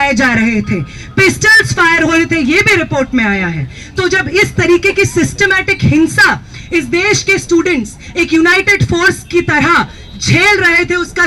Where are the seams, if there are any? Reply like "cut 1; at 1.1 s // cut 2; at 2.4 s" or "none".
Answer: none